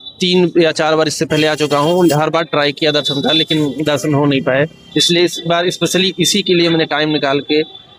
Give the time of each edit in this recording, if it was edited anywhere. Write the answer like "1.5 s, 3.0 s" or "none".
none